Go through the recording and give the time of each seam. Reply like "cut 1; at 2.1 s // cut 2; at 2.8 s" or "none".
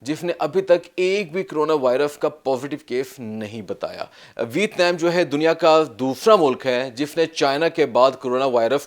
cut 1; at 4.2 s